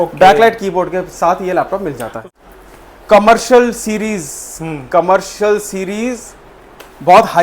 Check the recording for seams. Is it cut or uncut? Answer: cut